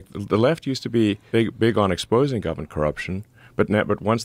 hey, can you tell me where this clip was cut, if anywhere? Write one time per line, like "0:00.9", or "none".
0:01.2